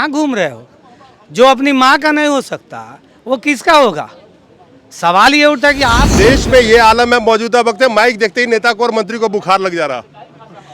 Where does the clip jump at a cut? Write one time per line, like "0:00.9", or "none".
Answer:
0:06.0